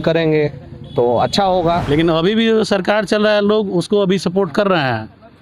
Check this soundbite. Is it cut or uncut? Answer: cut